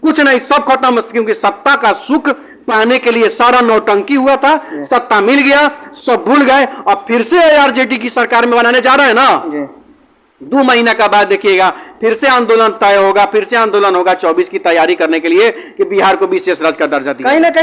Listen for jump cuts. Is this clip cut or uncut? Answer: uncut